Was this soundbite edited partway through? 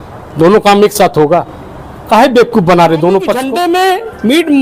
yes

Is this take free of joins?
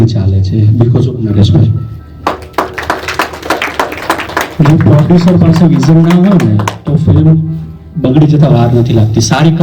yes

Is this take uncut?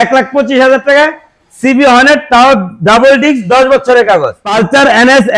no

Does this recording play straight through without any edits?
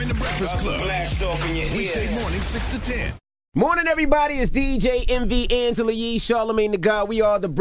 yes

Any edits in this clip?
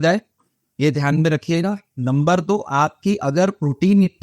no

